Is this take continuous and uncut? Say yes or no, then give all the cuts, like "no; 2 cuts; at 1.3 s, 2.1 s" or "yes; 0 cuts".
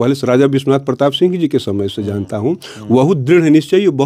yes; 0 cuts